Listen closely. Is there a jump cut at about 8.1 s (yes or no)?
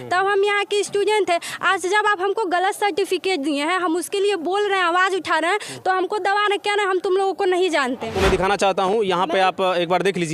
yes